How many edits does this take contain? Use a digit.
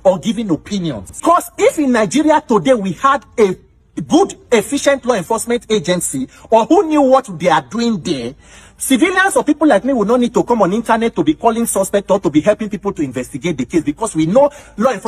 1